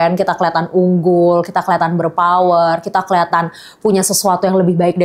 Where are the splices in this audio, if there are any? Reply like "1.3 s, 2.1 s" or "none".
none